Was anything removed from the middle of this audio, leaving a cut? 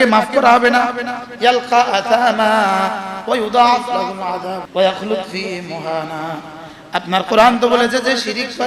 yes; 1 cut; at 4.7 s

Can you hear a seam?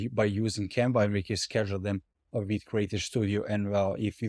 no; 0 cuts

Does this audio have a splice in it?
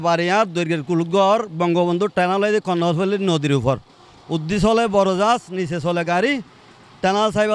no; 0 cuts

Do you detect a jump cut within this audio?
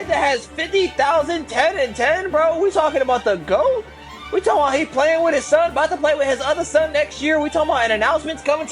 no; 0 cuts

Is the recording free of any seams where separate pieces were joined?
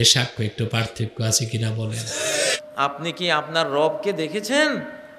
no; 1 cut; at 2.6 s

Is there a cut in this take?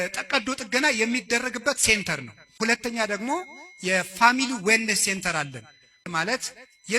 yes; 2 cuts; at 2.5 s, 6.0 s

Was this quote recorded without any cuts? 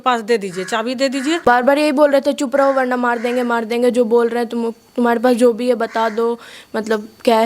no; 1 cut; at 1.4 s

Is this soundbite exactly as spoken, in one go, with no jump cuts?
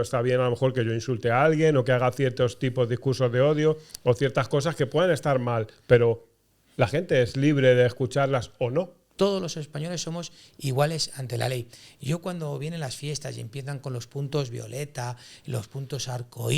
no; 1 cut; at 9.0 s

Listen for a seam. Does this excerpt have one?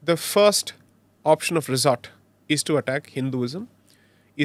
no; 0 cuts

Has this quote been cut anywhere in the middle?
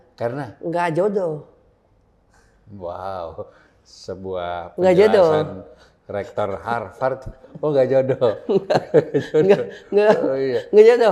no; 0 cuts

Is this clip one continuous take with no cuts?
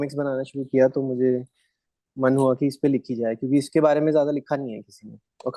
yes; 0 cuts

